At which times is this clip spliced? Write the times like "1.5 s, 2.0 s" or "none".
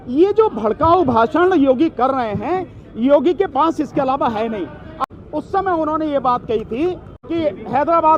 5.0 s, 7.1 s